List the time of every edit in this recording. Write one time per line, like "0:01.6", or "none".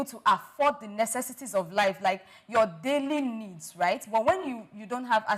none